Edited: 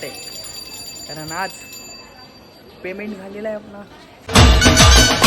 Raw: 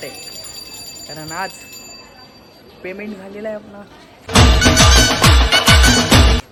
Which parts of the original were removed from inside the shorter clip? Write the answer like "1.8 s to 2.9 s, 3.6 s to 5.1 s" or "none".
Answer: none

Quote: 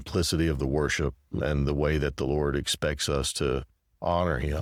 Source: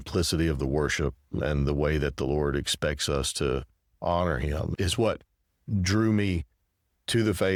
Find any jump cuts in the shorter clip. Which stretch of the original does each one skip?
none

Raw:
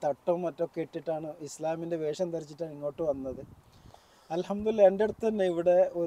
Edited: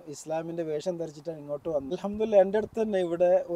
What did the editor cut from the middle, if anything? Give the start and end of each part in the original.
3.2 s to 4.4 s

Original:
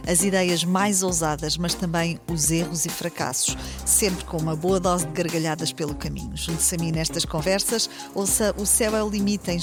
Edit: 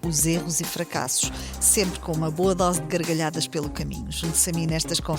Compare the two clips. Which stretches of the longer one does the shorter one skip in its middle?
none

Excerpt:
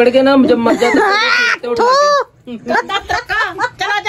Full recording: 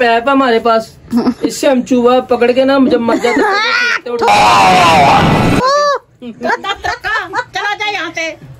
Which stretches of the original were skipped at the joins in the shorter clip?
4.3 s to 5.6 s

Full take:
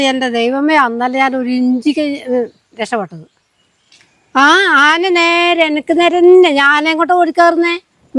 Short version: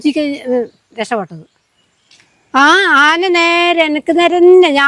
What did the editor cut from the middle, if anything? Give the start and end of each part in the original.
none

